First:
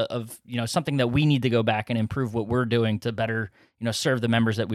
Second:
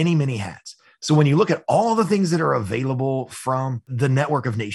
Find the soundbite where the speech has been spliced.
second; 1 cut; at 3.8 s

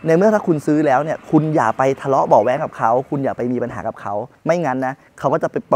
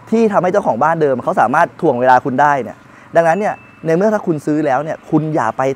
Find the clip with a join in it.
first; 1 cut; at 4.3 s

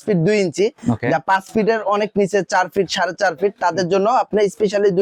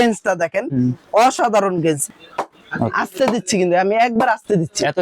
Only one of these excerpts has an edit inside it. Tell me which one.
second; 1 cut; at 2.0 s

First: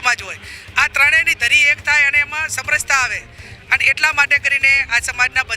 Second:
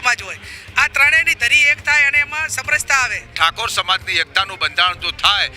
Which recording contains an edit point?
second; 1 cut; at 3.3 s

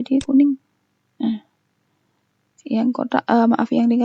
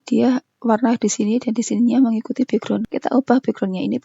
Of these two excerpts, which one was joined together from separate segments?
second; 1 cut; at 2.9 s

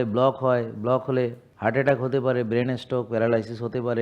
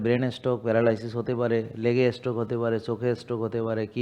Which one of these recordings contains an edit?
first; 1 cut; at 1.5 s

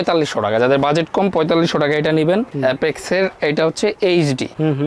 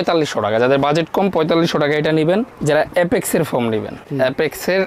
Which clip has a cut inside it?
first; 1 cut; at 2.5 s

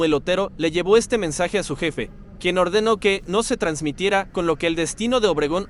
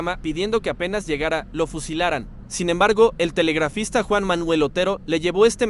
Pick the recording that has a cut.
second; 1 cut; at 2.4 s

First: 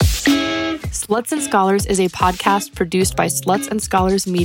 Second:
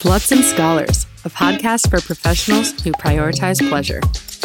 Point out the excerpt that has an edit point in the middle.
first; 1 cut; at 0.9 s

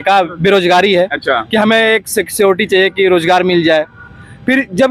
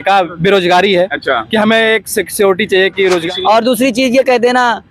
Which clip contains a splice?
second; 1 cut; at 3.2 s

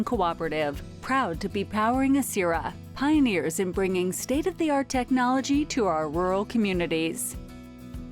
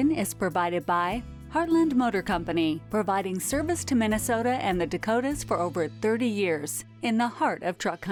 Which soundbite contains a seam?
first; 1 cut; at 7.2 s

